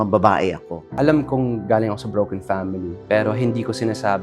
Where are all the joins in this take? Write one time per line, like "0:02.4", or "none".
0:01.0